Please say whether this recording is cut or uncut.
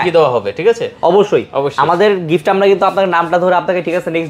uncut